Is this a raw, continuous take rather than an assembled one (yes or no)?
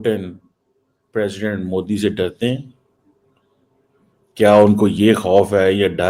no